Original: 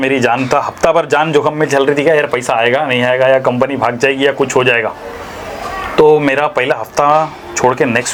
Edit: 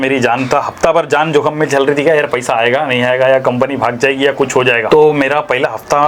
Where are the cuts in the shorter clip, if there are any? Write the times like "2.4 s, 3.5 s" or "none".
4.8 s